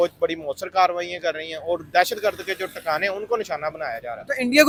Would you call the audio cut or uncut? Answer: uncut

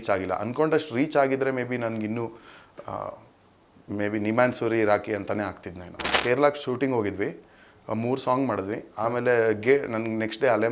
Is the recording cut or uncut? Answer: cut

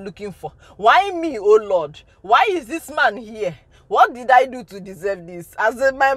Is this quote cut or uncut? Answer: uncut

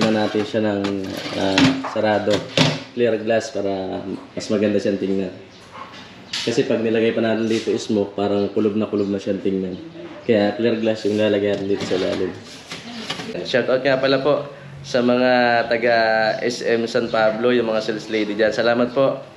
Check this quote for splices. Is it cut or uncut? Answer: cut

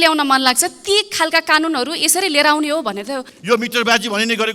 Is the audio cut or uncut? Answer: cut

